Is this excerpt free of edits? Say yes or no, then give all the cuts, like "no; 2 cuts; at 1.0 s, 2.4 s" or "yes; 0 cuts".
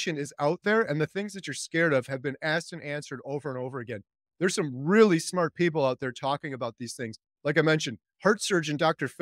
yes; 0 cuts